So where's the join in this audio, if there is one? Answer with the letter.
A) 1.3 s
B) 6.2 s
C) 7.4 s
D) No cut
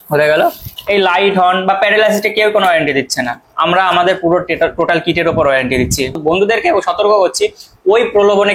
B